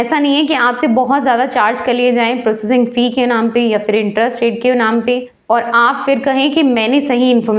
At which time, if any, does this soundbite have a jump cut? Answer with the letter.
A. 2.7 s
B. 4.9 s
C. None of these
C